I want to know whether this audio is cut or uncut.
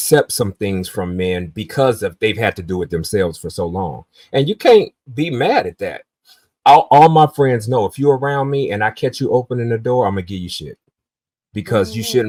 uncut